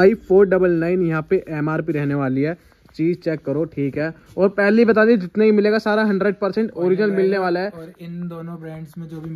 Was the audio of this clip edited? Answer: no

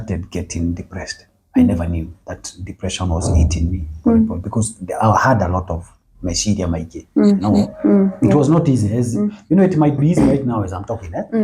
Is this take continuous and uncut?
yes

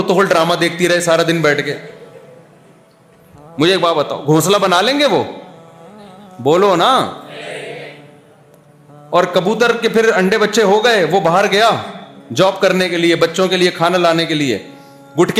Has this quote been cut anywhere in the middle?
no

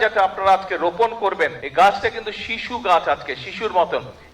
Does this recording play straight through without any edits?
no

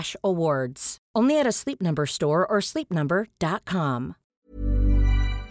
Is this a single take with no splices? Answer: no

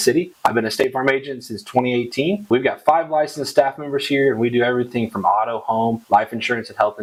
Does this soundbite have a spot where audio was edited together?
no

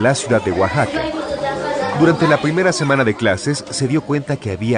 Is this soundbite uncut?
yes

